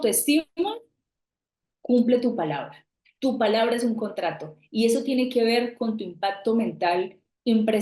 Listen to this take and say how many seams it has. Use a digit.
0